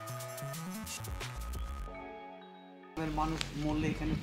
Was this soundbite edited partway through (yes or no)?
yes